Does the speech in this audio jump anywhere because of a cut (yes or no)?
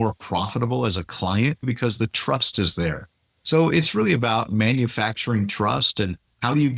yes